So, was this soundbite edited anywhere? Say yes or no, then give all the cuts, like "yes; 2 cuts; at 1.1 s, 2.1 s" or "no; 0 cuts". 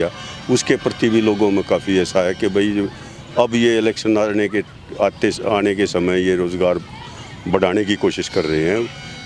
no; 0 cuts